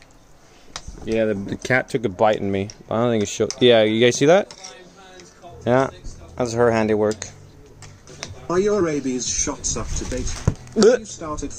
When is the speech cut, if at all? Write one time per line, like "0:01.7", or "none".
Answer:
0:08.2

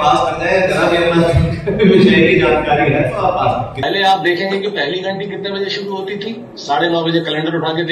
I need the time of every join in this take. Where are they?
0:03.7

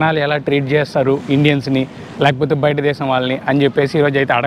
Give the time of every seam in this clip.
none

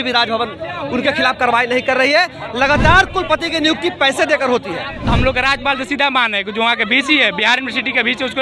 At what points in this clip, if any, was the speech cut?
0:05.0

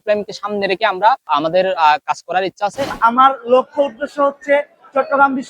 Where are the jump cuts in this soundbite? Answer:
0:01.2
0:02.9

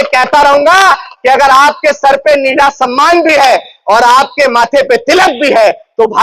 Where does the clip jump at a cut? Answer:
none

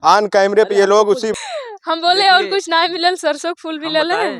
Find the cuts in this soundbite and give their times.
0:01.3

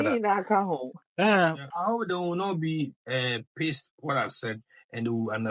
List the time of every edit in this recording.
0:01.7

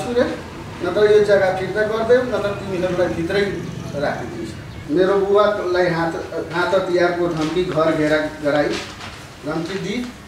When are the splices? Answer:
0:04.8

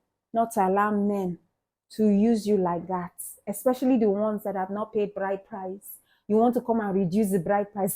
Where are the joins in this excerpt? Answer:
none

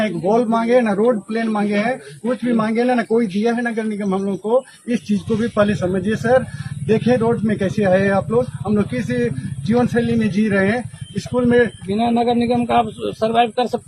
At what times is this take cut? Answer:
none

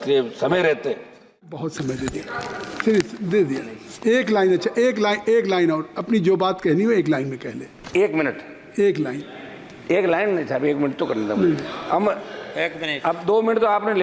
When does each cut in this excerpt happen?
0:01.7

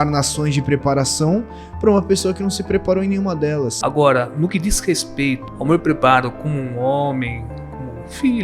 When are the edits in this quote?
0:03.7
0:05.5

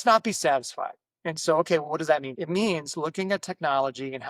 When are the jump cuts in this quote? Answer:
0:02.3

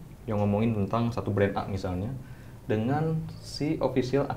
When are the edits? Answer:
none

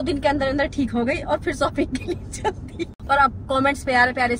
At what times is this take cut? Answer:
0:02.9

